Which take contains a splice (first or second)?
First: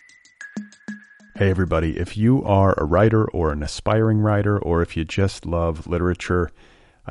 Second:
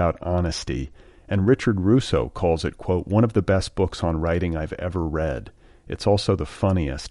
first